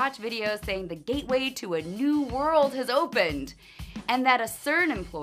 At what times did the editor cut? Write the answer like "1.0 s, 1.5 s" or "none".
none